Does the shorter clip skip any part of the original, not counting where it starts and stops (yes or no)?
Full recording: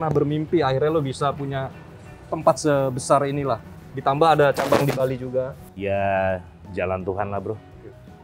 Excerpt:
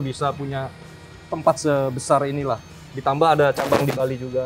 no